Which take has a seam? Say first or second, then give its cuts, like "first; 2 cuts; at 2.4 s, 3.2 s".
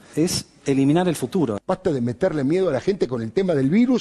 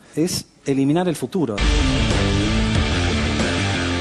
first; 1 cut; at 1.6 s